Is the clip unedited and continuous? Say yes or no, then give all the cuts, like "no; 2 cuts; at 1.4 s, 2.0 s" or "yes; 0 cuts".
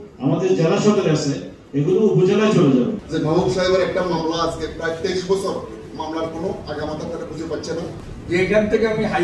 no; 2 cuts; at 3.0 s, 8.1 s